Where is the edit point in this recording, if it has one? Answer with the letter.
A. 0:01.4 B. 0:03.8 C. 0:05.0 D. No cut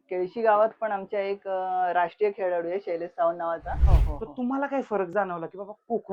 B